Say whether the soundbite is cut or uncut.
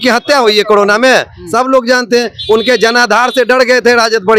uncut